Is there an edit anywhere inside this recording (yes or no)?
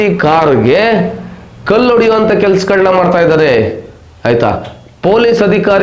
no